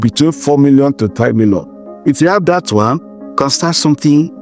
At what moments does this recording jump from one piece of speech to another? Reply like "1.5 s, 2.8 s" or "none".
none